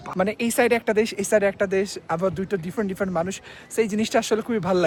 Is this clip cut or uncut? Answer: uncut